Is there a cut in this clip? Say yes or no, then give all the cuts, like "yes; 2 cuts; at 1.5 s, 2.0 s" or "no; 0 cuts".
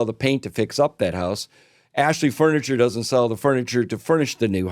no; 0 cuts